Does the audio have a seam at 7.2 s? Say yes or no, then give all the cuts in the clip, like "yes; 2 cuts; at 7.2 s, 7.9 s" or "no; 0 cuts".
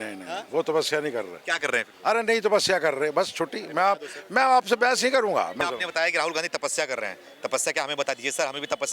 no; 1 cut; at 5.6 s